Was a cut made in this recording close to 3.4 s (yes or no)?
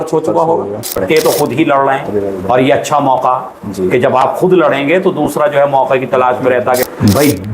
no